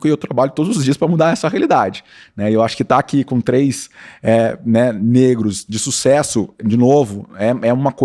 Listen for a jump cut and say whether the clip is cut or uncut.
uncut